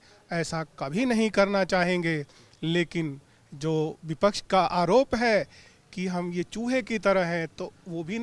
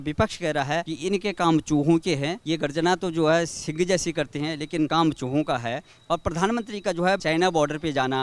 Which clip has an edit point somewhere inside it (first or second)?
second